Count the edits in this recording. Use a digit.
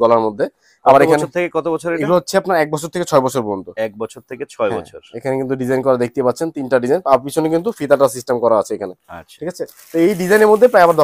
0